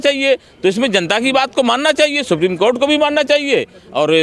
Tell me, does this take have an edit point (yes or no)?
no